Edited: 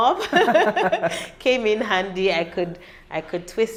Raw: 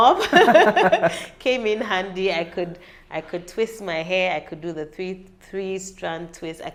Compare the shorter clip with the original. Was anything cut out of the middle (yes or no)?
no